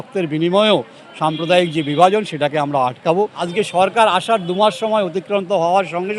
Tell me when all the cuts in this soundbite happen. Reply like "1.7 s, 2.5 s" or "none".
3.4 s